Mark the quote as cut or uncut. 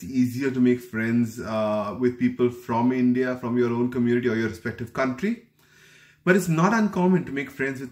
uncut